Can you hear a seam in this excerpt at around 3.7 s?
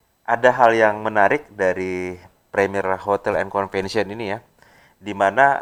no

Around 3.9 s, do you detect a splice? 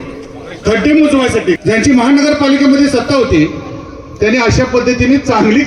no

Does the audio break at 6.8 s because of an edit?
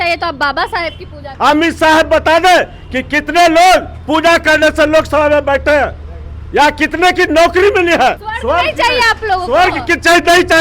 no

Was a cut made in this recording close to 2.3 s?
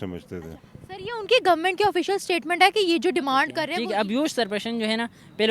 no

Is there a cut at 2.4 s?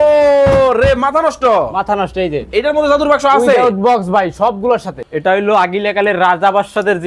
no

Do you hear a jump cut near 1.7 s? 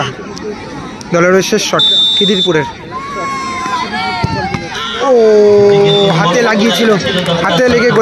no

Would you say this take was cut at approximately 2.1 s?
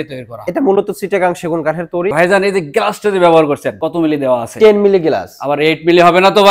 yes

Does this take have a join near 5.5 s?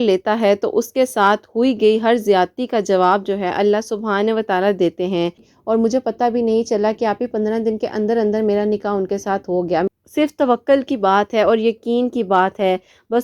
yes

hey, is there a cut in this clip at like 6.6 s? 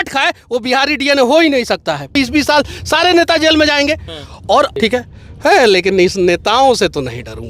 no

